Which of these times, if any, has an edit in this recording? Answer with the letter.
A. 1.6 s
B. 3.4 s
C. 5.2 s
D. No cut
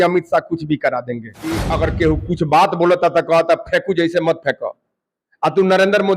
A